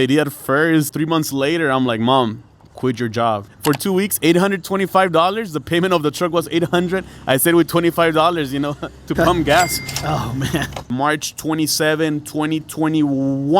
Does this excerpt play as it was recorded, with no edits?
no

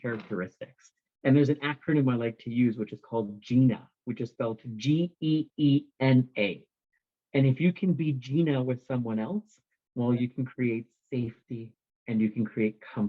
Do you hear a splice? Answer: no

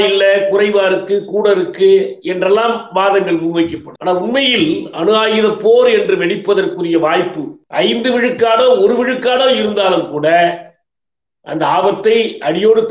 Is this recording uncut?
yes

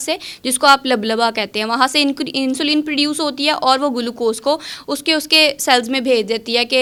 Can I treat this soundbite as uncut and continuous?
yes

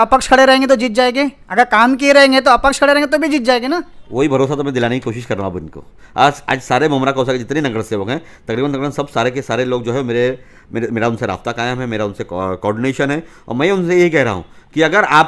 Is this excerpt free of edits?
yes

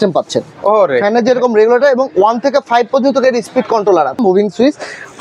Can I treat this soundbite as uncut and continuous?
no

